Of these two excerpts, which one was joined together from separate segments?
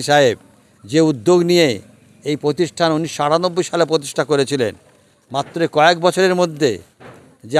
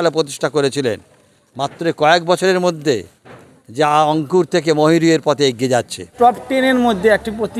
second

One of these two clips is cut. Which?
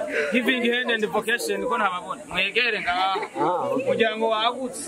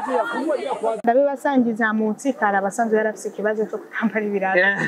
second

